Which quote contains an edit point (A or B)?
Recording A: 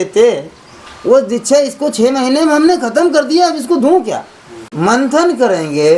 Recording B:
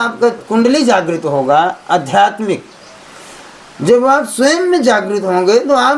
A